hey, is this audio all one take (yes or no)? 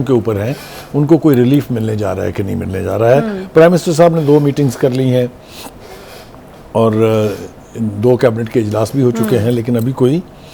yes